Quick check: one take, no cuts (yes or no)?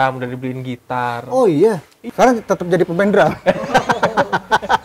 no